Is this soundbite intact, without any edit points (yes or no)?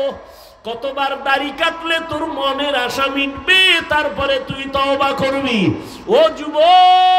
yes